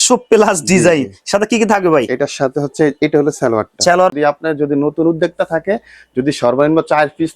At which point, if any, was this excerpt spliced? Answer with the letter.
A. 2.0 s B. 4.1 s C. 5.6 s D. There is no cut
B